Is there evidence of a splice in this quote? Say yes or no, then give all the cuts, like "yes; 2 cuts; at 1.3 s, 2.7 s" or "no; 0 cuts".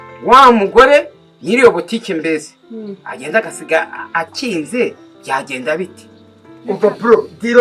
yes; 1 cut; at 6.6 s